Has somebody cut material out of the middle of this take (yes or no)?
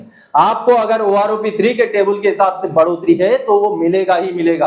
no